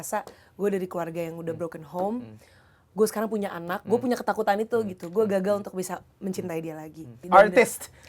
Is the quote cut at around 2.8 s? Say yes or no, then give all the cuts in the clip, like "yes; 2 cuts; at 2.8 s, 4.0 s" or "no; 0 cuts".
no; 1 cut; at 7.2 s